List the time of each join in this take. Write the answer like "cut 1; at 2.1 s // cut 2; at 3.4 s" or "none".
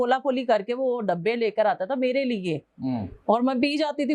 none